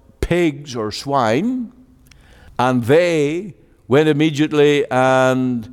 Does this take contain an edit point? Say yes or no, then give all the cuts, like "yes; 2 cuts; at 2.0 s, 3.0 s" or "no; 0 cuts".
no; 0 cuts